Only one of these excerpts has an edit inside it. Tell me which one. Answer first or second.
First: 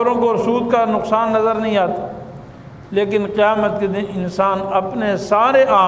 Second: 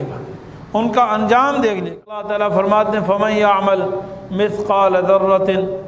second